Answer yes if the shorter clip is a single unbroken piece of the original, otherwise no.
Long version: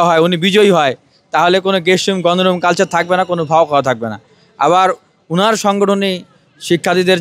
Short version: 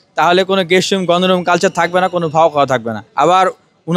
no